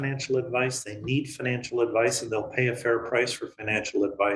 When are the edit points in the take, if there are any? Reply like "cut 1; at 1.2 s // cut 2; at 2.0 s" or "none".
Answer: none